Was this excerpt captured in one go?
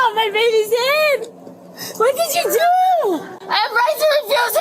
yes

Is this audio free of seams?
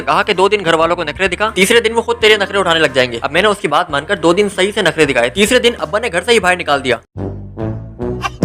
yes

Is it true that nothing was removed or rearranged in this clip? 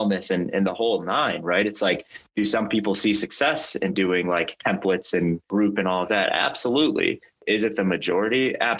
no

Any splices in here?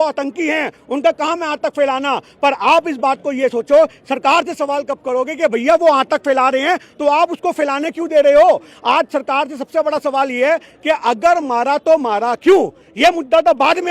no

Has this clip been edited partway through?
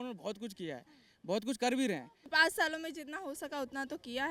yes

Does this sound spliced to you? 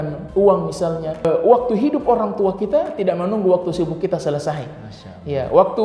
yes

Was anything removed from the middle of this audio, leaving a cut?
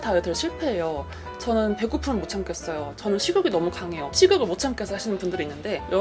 no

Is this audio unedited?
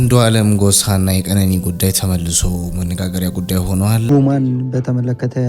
no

